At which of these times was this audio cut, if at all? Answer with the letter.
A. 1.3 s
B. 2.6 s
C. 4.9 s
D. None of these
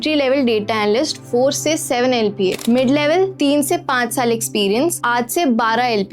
B